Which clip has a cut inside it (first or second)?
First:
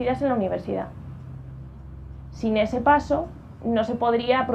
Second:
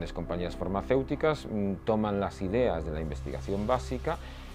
first